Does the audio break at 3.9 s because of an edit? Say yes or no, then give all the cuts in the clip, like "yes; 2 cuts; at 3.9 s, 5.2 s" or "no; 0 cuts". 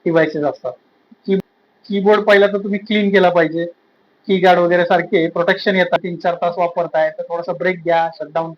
no; 2 cuts; at 1.4 s, 6.0 s